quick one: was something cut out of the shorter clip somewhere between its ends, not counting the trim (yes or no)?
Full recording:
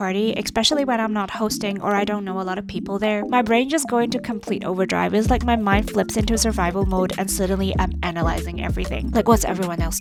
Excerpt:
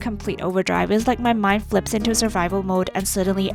no